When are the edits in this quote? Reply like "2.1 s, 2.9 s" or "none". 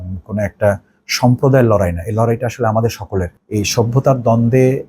3.4 s